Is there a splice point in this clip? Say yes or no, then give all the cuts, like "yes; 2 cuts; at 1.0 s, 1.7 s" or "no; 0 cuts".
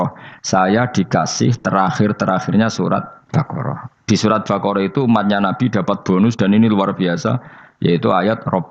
yes; 1 cut; at 3.2 s